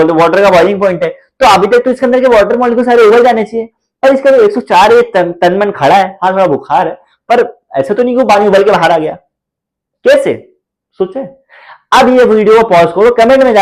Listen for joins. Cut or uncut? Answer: uncut